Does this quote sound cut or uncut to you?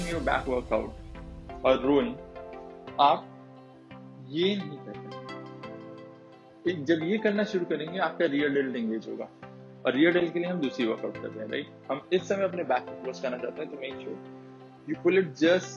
uncut